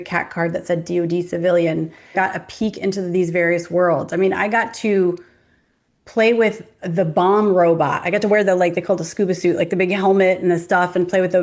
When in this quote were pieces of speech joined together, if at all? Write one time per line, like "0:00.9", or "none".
0:02.1